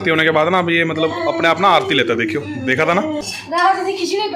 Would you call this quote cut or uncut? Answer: cut